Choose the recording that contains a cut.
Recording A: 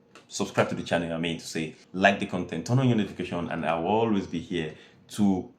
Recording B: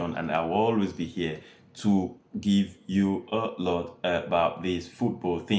A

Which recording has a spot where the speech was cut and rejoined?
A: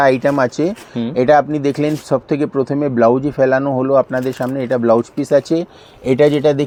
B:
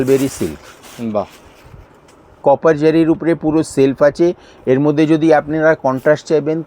B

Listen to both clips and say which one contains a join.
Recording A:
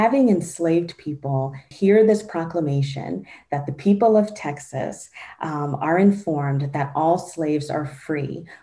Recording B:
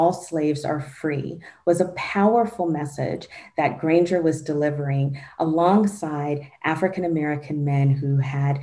A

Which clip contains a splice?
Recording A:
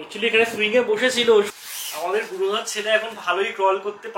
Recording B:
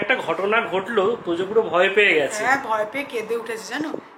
A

